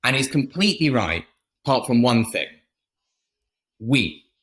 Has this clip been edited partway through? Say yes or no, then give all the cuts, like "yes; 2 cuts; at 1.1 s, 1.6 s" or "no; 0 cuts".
yes; 1 cut; at 3.4 s